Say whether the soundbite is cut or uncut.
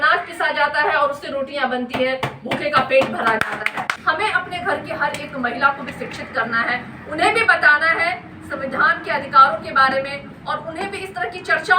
cut